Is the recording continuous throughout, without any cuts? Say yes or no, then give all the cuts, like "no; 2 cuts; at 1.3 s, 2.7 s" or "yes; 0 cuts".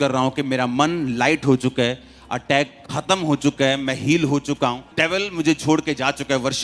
no; 1 cut; at 4.9 s